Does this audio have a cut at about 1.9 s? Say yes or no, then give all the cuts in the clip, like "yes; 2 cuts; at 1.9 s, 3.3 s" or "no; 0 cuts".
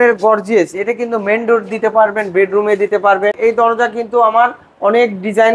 no; 1 cut; at 3.4 s